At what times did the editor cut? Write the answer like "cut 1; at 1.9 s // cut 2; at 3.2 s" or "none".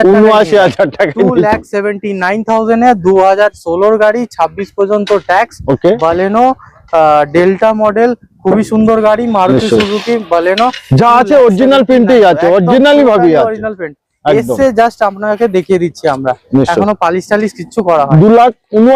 none